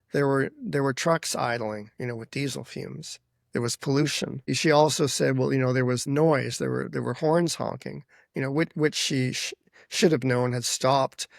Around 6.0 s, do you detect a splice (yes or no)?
yes